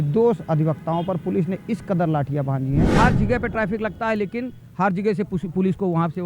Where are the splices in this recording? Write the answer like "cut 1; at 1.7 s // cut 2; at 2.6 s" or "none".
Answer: cut 1; at 2.9 s